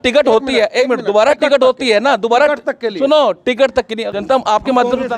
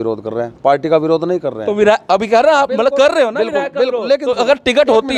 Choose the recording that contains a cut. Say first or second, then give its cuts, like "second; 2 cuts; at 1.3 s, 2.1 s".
first; 1 cut; at 4.0 s